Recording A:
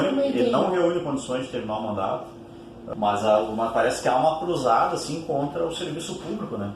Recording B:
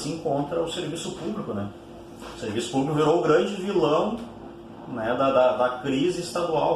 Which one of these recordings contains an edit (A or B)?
A